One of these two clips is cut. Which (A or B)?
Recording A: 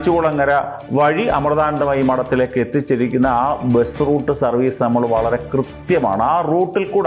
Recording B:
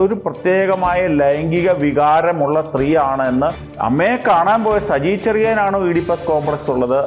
B